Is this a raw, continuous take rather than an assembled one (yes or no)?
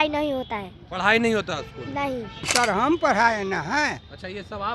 no